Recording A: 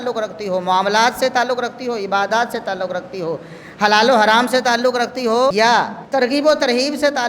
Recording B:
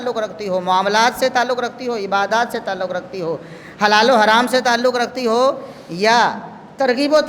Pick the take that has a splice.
A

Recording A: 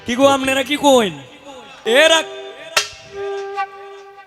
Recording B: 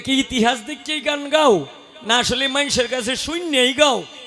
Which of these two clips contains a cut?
A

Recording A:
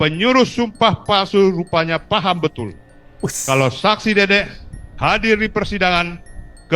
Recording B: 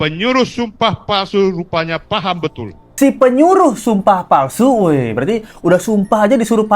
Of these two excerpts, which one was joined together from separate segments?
B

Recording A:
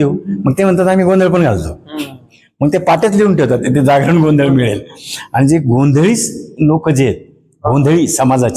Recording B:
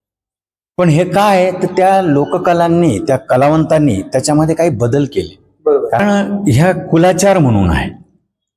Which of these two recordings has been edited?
B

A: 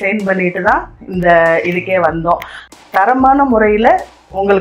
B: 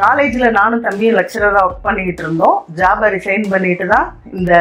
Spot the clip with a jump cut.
A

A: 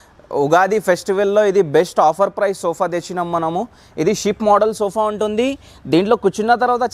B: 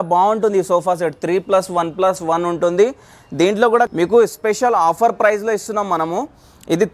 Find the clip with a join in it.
B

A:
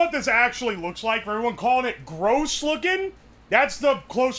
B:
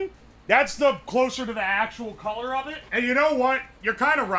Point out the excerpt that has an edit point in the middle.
B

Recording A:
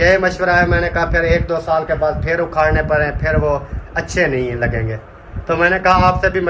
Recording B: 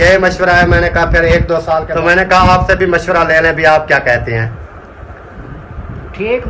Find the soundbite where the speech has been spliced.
B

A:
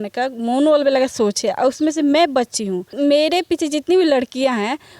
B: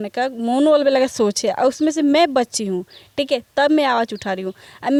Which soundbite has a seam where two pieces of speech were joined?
A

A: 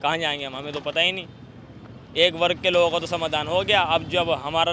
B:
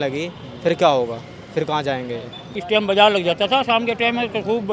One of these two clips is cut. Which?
B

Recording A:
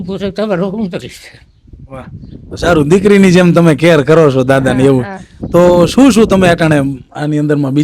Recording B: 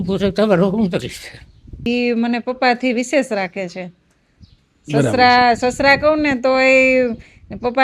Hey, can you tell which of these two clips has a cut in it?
B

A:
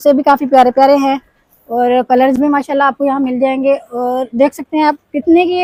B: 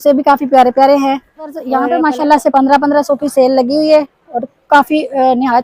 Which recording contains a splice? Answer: B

